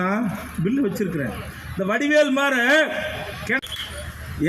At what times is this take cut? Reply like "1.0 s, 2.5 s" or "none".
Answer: 3.6 s